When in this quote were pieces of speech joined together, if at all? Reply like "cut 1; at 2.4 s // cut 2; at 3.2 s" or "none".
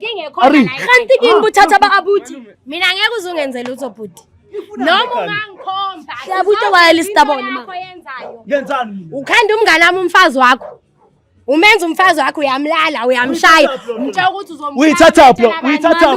cut 1; at 2.4 s